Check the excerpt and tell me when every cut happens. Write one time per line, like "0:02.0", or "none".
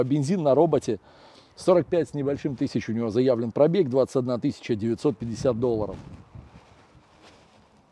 none